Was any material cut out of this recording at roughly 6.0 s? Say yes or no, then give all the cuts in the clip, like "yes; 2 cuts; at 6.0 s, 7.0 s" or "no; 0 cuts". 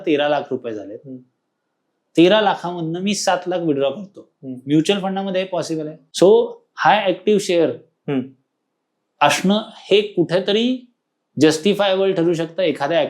yes; 1 cut; at 6.0 s